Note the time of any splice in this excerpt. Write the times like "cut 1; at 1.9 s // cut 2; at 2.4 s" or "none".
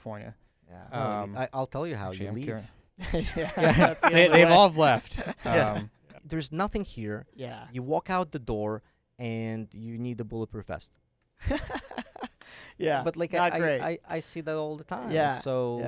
cut 1; at 6.2 s